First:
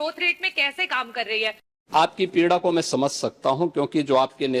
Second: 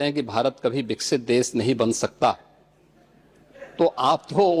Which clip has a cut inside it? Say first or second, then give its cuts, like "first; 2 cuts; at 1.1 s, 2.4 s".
first; 1 cut; at 1.6 s